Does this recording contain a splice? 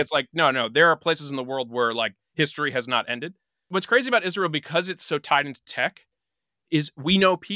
yes; 1 cut; at 3.6 s

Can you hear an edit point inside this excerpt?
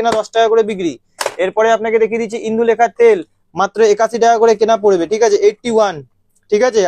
no; 0 cuts

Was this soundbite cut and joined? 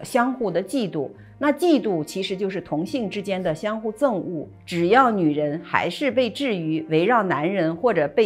yes; 1 cut; at 4.6 s

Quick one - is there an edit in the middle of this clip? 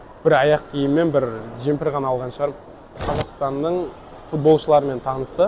yes; 1 cut; at 3.0 s

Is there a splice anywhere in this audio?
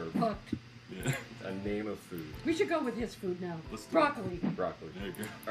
yes; 2 cuts; at 2.8 s, 4.6 s

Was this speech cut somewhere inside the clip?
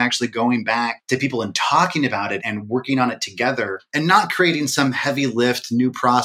yes; 3 cuts; at 1.0 s, 2.4 s, 3.8 s

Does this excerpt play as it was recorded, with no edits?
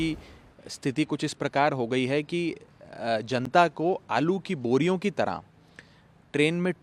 yes; 0 cuts

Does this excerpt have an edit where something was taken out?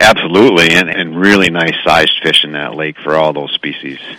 yes; 1 cut; at 0.9 s

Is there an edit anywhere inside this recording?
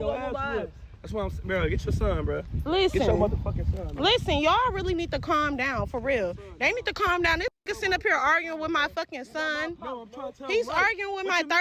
no; 0 cuts

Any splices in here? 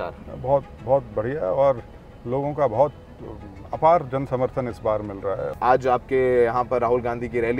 yes; 1 cut; at 5.5 s

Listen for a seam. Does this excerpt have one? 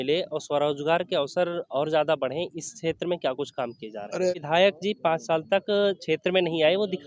yes; 1 cut; at 4.3 s

